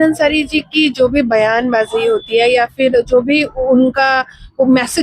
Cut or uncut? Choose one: uncut